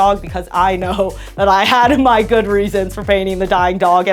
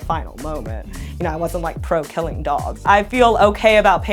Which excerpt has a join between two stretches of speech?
second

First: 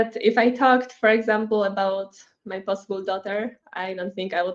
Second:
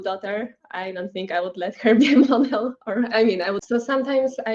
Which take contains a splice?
second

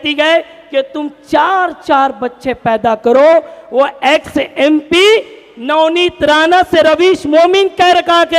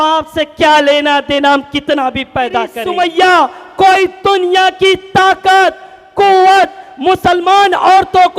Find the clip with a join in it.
second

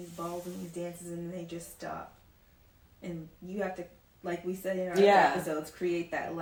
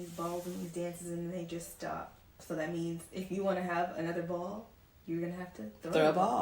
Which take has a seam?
second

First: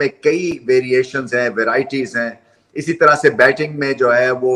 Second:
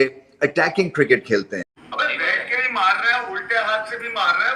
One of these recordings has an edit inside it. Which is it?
second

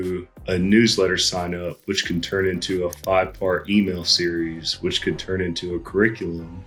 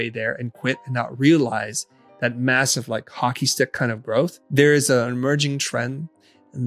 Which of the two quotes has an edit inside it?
second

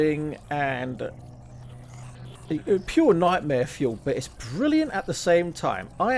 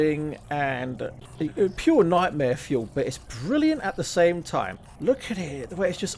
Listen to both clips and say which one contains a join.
second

